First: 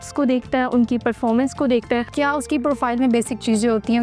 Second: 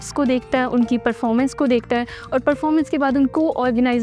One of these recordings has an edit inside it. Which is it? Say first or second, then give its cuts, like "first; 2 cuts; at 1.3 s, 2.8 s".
first; 1 cut; at 2.1 s